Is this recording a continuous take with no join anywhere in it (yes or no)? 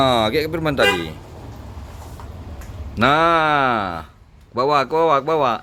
yes